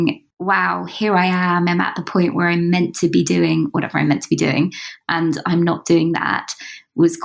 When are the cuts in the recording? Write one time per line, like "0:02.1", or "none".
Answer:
none